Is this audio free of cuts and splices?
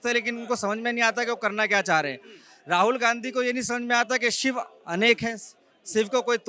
yes; 0 cuts

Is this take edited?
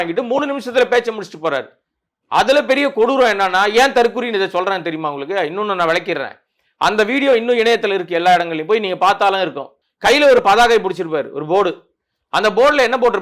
yes; 1 cut; at 9.8 s

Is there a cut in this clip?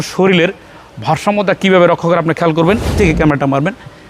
yes; 1 cut; at 2.9 s

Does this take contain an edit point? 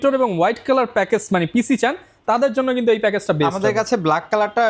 no; 0 cuts

